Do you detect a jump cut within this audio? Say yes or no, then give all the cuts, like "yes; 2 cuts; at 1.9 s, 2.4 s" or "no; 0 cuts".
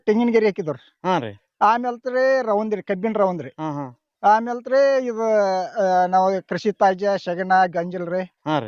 no; 0 cuts